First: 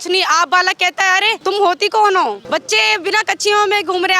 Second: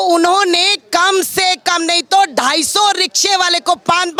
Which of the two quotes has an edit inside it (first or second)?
first